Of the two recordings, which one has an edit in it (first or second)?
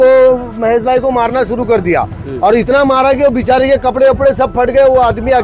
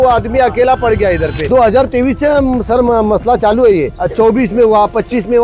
second